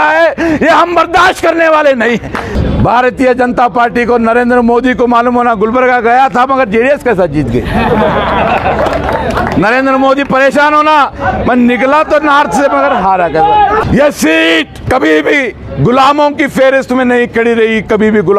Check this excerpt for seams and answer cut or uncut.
cut